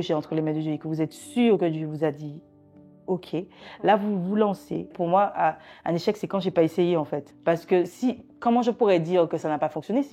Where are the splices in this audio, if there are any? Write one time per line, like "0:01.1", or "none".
0:05.0
0:07.3